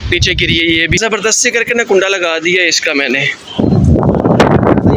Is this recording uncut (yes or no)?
no